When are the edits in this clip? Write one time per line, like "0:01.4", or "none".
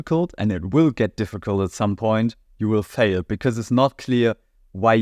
none